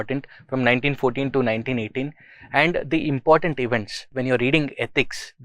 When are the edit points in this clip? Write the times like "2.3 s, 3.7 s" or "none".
4.2 s